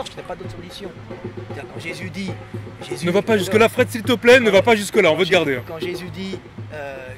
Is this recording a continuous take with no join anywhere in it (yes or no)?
yes